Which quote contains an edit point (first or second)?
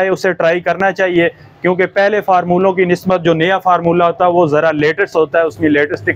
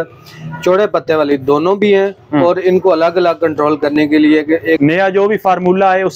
second